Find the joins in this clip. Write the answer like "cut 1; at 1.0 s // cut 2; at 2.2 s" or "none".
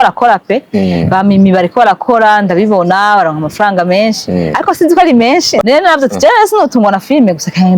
cut 1; at 5.6 s